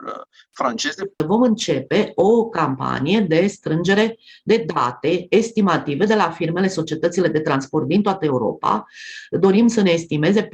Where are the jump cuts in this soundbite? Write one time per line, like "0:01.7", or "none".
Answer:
0:01.0